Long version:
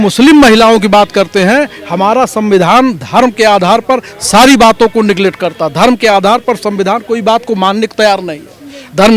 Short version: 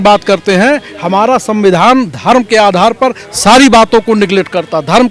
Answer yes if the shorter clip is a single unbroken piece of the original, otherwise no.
yes